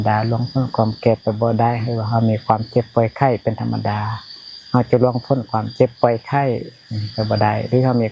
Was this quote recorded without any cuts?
yes; 0 cuts

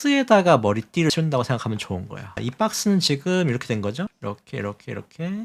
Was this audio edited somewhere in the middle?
no; 0 cuts

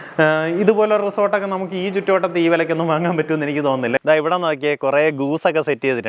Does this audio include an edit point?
yes; 1 cut; at 4.0 s

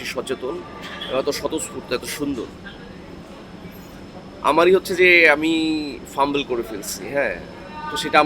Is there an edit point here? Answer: no; 0 cuts

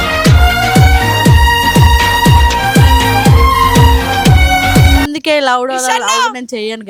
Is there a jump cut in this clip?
no; 0 cuts

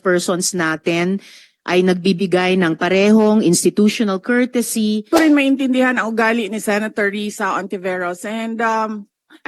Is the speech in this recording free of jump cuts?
no; 1 cut; at 5.1 s

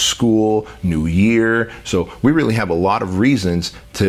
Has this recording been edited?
no; 0 cuts

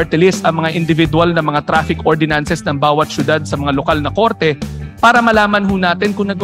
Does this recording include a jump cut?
no; 0 cuts

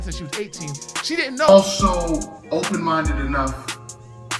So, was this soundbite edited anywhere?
yes; 1 cut; at 1.5 s

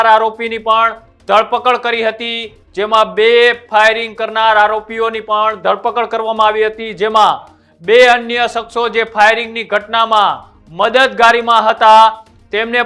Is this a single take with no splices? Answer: yes; 0 cuts

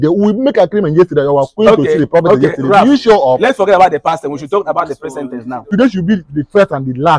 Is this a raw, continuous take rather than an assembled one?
no; 1 cut; at 5.7 s

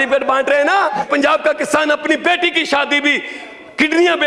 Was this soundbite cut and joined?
yes; 1 cut; at 1.1 s

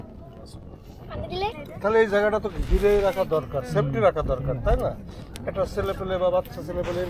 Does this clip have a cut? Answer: no; 0 cuts

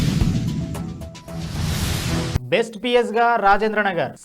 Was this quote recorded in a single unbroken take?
no; 1 cut; at 2.4 s

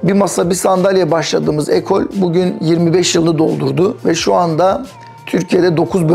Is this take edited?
no; 0 cuts

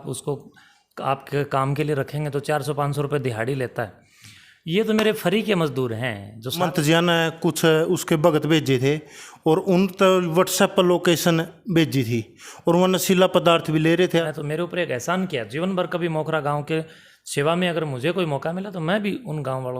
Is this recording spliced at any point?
yes; 2 cuts; at 6.6 s, 14.2 s

